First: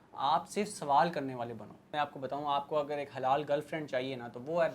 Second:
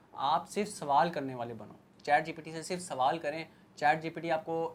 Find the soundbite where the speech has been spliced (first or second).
first